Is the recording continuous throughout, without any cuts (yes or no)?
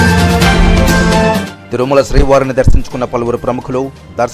no